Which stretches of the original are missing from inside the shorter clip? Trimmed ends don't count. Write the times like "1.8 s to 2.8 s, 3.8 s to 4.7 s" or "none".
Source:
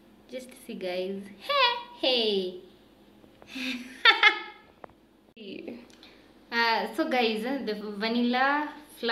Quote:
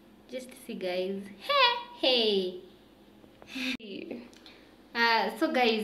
3.8 s to 5.4 s